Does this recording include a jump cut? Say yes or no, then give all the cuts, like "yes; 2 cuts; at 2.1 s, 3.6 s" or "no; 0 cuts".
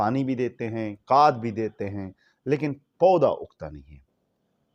no; 0 cuts